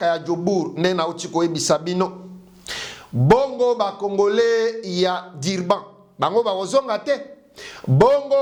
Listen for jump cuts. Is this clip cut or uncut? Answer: uncut